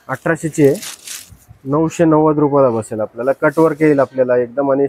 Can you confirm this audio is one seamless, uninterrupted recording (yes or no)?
yes